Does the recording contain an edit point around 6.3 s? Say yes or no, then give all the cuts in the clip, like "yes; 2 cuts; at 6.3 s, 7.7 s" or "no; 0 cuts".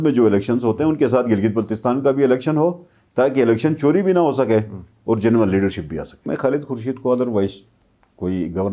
yes; 1 cut; at 6.3 s